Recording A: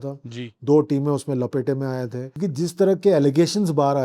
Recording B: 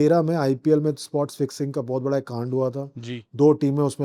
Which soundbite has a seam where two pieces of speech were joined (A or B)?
A